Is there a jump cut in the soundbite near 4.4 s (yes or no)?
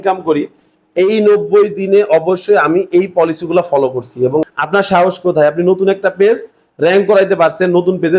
yes